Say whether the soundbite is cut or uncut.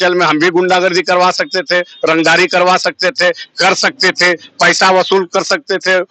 uncut